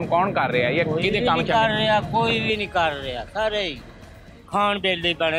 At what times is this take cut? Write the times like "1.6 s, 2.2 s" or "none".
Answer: none

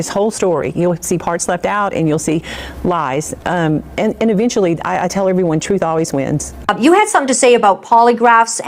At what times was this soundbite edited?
6.5 s

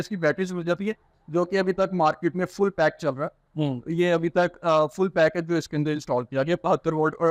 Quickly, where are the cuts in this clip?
none

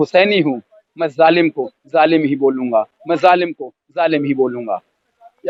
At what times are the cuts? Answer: none

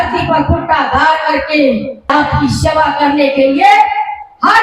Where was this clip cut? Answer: 2.1 s

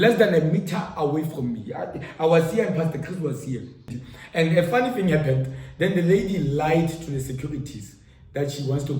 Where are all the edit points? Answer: 3.9 s

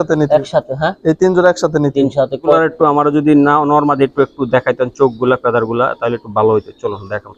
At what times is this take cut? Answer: 2.5 s

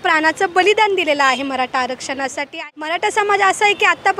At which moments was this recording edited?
2.5 s

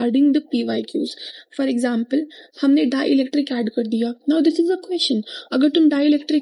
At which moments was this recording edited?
none

